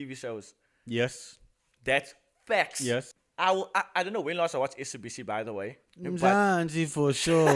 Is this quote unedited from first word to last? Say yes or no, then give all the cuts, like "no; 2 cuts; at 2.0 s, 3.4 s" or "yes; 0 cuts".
no; 2 cuts; at 3.2 s, 5.8 s